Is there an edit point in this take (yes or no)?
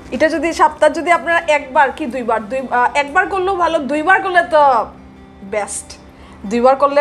no